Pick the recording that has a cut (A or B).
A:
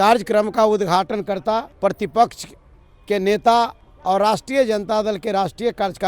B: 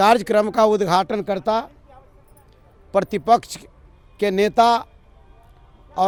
A